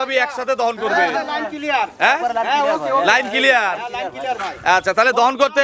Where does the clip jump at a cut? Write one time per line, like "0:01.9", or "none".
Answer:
none